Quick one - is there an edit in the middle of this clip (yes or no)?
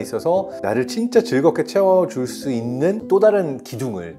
no